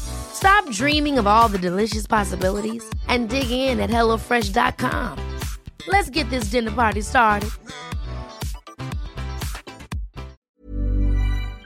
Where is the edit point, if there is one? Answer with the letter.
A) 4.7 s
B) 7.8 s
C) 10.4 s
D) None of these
C